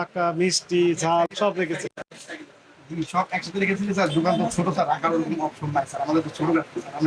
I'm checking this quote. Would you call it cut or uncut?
uncut